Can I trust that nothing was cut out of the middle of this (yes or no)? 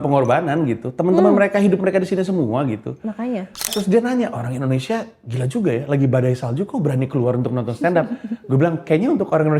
no